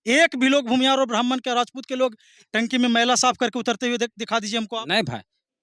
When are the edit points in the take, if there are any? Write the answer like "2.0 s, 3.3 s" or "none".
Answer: none